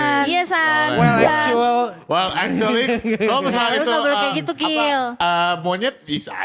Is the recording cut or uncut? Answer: uncut